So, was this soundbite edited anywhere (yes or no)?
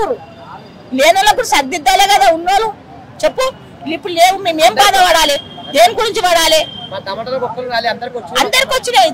no